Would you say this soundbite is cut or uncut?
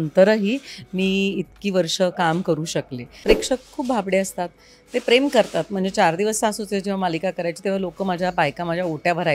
cut